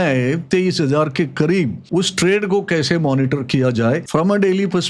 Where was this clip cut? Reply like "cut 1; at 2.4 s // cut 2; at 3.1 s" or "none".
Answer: cut 1; at 1.8 s // cut 2; at 4.0 s